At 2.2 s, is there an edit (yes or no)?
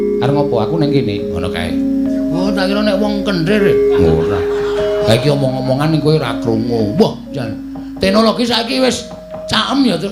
no